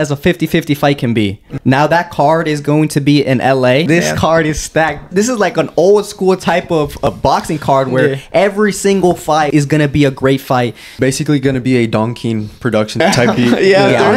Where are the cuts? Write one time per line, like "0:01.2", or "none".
0:01.5
0:03.9
0:05.1
0:07.1
0:09.5
0:10.9
0:13.0